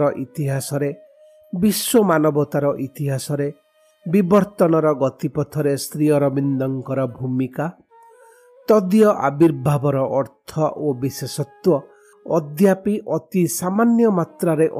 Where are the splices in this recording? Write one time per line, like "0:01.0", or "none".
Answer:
none

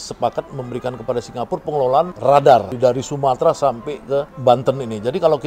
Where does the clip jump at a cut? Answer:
0:02.1
0:02.7
0:04.3

